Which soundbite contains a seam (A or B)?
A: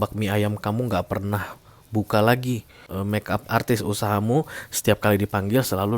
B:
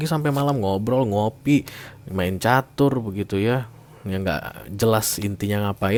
A